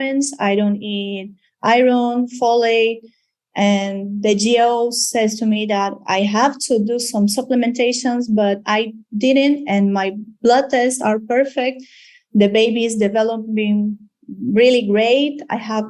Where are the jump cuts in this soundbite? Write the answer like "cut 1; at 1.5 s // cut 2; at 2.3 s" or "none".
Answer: none